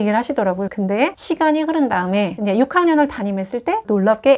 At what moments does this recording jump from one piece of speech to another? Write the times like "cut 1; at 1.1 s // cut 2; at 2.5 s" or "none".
cut 1; at 1.2 s